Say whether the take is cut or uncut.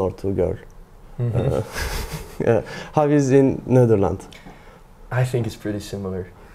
uncut